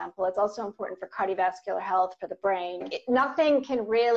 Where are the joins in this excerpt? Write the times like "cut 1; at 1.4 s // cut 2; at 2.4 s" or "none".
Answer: cut 1; at 2.9 s